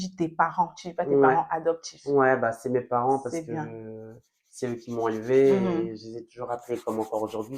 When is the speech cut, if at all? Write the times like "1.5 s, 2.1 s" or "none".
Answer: none